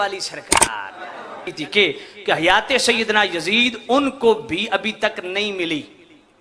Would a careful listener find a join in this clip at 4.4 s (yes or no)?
no